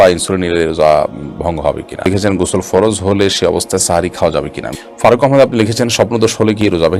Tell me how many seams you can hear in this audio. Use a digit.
2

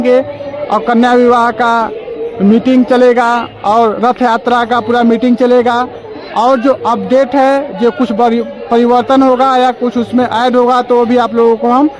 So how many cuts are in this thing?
0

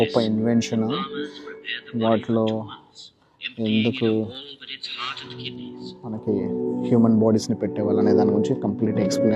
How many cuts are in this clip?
0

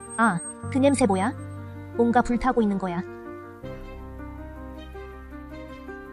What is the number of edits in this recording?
1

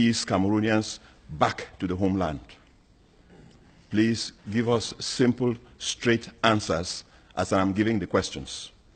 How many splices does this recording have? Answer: 1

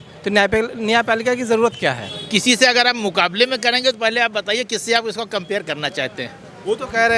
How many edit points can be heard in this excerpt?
1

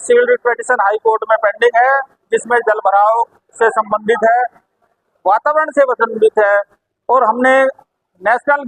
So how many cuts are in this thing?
0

